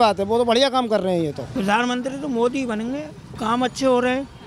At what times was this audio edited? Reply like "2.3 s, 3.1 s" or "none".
1.4 s, 3.3 s